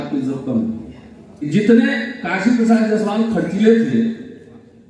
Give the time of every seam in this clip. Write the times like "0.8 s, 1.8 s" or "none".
1.5 s